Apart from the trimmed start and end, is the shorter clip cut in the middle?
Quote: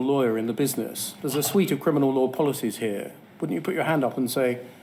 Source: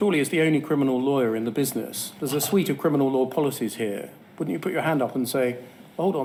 no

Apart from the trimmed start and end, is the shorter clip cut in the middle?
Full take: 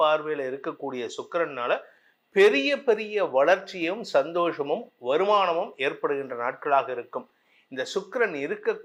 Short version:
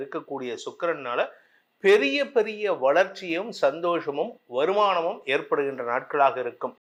no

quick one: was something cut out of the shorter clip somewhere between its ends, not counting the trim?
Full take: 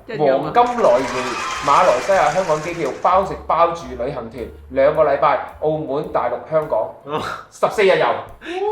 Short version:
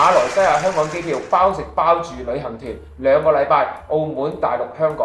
no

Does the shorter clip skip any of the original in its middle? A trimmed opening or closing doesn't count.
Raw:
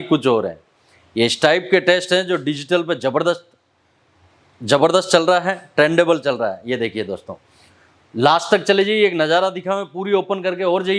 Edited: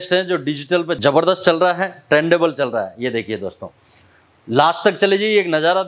yes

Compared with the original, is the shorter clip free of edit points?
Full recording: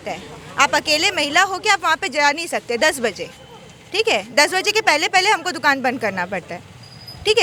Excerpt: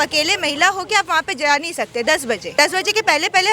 no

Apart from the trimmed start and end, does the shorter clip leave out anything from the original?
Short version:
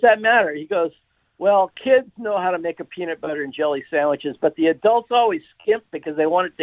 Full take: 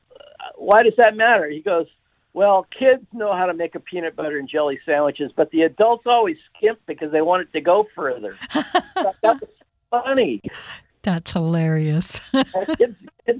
no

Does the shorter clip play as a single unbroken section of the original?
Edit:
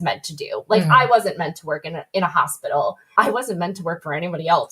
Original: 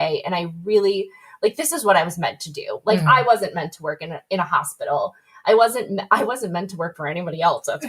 no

